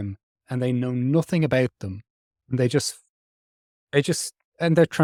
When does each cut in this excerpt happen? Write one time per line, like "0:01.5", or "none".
none